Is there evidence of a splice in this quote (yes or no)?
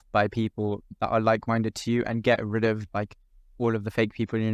no